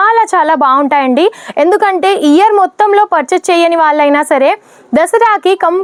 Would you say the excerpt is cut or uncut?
uncut